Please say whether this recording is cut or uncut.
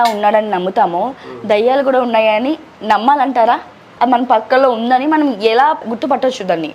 cut